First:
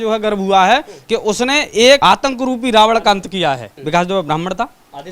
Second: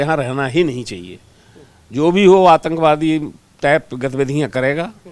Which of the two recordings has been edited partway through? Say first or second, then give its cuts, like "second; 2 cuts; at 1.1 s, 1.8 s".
first; 2 cuts; at 2.0 s, 3.7 s